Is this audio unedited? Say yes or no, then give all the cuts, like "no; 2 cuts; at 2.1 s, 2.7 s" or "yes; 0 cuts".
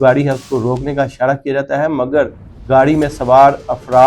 yes; 0 cuts